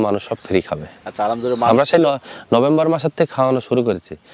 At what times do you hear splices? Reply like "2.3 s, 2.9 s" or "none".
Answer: none